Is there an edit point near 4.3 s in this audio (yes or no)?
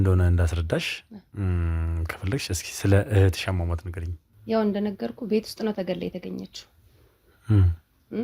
yes